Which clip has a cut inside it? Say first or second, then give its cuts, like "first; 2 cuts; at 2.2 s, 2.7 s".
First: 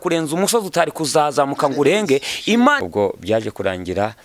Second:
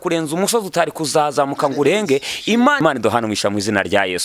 first; 1 cut; at 2.8 s